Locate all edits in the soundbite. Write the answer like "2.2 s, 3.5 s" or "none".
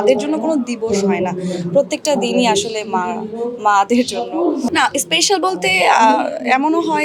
none